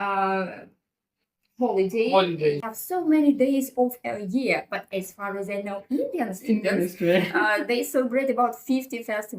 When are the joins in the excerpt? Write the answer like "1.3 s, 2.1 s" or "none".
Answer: 2.6 s